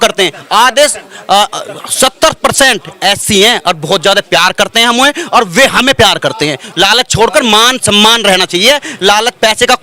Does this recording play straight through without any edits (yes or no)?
no